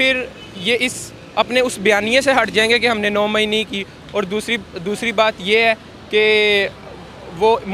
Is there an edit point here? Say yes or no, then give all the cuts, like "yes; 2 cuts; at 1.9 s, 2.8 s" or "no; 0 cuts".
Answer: no; 0 cuts